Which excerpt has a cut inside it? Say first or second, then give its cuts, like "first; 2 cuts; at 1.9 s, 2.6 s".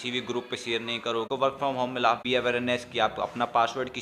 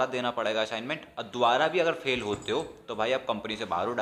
first; 2 cuts; at 1.3 s, 2.2 s